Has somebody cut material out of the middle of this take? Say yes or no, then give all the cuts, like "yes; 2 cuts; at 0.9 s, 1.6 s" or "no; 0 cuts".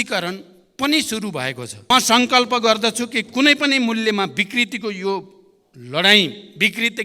yes; 1 cut; at 1.9 s